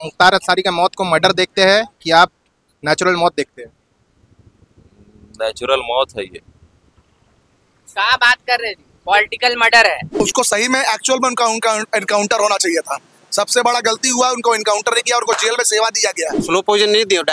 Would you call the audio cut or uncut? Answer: cut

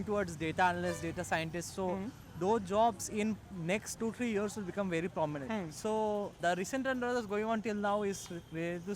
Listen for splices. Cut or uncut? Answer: cut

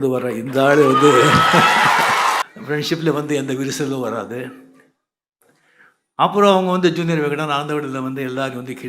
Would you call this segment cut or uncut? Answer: cut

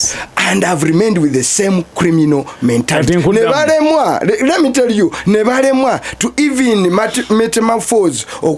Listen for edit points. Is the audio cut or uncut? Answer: uncut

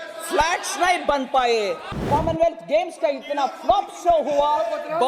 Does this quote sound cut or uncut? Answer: cut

